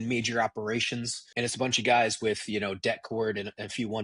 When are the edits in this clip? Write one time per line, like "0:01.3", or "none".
0:01.2